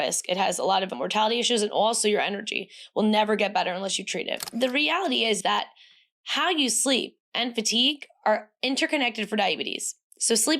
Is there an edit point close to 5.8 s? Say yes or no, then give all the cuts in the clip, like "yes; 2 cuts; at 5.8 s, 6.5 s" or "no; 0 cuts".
no; 1 cut; at 4.4 s